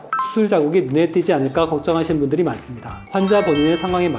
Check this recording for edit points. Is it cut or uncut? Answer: cut